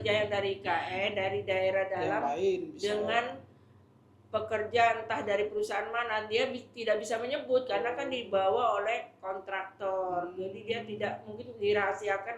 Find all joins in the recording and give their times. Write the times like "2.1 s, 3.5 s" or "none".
none